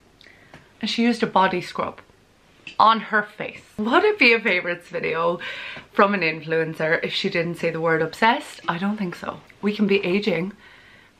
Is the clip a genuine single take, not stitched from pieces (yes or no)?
no